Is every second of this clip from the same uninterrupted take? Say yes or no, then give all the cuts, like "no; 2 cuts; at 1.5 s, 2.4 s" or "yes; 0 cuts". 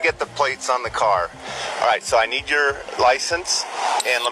yes; 0 cuts